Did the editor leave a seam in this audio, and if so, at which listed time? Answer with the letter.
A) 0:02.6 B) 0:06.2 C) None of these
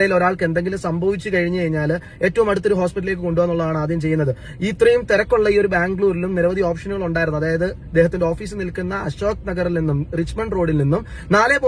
C